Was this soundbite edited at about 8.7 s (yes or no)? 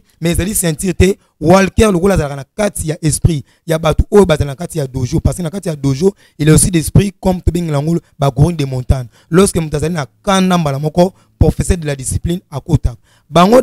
no